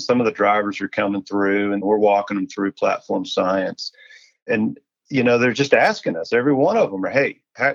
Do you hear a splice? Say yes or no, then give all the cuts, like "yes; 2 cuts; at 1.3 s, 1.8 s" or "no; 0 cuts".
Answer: yes; 2 cuts; at 1.8 s, 4.4 s